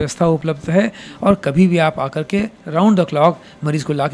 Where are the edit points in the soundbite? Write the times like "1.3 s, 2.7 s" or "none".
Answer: none